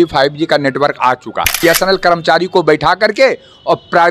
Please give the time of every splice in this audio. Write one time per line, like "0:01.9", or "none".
0:01.5